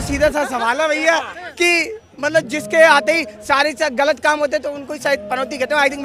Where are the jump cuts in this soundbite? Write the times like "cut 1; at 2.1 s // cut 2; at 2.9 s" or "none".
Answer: none